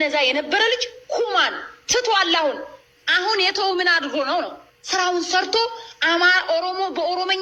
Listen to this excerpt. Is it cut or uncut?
uncut